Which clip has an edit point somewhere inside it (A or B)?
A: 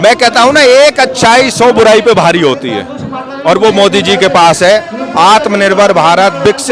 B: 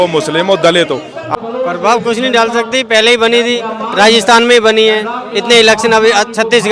B